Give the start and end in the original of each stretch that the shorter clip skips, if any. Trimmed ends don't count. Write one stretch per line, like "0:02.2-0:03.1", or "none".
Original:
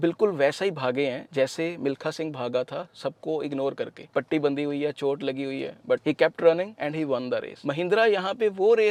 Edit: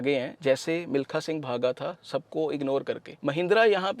0:04.0-0:07.5